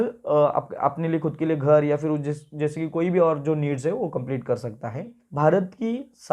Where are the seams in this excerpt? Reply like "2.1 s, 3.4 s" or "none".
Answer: 5.2 s

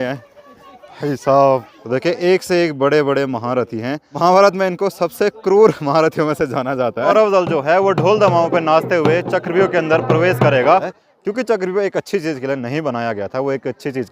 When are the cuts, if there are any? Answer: 1.7 s, 4.1 s, 7.1 s, 11.0 s

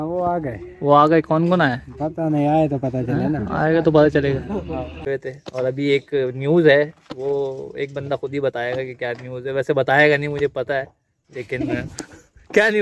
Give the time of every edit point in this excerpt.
5.0 s

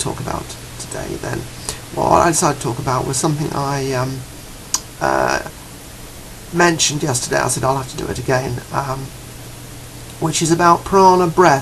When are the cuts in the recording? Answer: 8.2 s

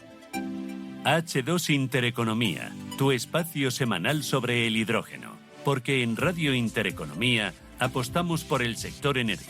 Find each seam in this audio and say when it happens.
1.0 s

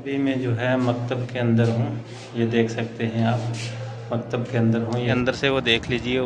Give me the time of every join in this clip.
5.1 s

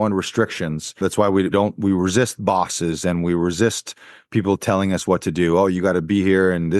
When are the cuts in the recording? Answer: 1.4 s

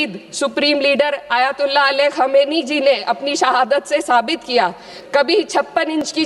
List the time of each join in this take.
4.9 s

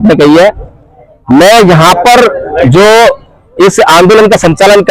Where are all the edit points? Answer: none

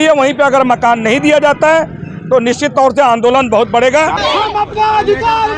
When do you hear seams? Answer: 4.1 s

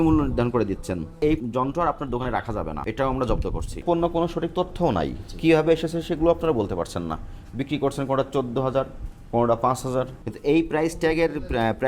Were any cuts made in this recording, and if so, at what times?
1.4 s, 2.8 s, 3.8 s, 10.2 s

